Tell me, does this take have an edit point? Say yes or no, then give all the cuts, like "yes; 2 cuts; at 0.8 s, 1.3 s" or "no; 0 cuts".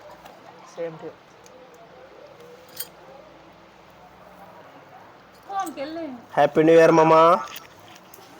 yes; 1 cut; at 5.5 s